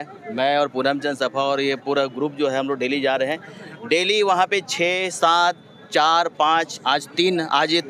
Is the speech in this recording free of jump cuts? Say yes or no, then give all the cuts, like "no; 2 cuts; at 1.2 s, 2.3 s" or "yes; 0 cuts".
yes; 0 cuts